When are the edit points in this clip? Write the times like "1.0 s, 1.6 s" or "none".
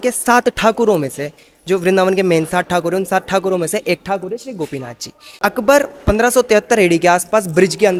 none